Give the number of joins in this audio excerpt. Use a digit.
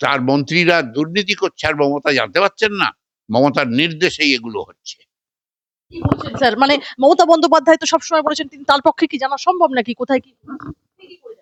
0